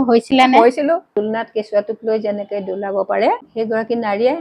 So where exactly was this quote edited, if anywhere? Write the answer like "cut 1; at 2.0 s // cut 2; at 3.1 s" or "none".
cut 1; at 1.1 s // cut 2; at 3.5 s